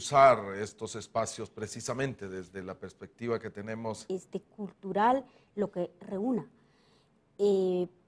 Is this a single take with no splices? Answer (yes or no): yes